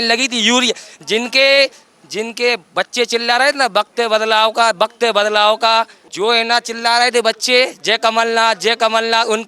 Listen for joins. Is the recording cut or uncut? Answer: cut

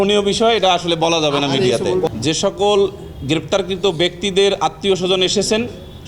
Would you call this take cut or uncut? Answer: cut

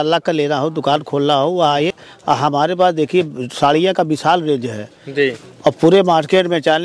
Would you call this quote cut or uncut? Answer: uncut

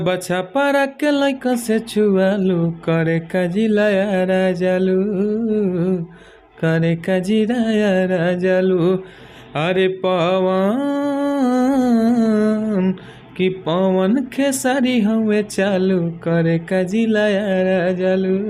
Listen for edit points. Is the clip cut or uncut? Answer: uncut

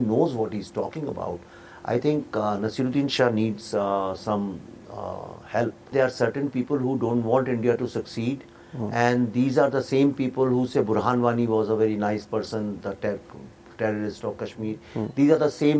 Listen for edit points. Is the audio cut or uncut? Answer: cut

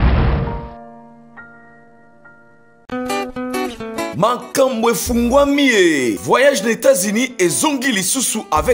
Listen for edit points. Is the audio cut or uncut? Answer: cut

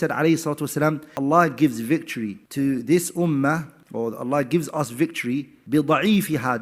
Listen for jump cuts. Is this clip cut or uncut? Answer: cut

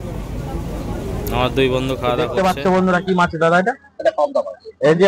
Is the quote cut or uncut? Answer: cut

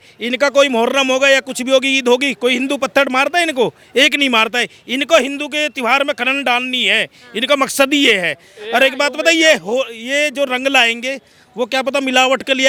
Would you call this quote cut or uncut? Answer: uncut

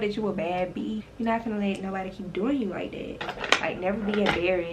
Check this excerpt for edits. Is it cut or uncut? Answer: cut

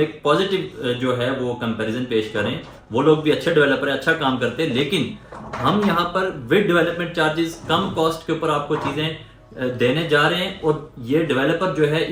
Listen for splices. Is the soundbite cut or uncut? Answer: uncut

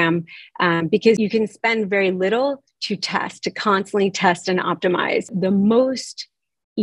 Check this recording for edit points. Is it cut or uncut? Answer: cut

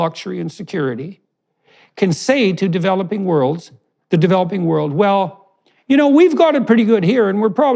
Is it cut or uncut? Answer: uncut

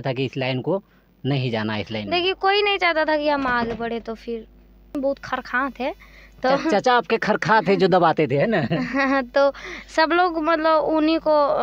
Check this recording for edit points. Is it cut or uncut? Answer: cut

